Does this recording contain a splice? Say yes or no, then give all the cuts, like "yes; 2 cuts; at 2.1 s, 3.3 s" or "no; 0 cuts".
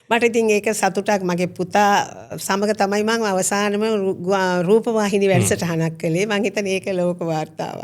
no; 0 cuts